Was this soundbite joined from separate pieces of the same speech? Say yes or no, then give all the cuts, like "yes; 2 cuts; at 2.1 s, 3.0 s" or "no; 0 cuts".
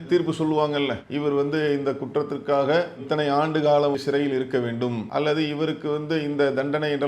yes; 2 cuts; at 4.0 s, 5.0 s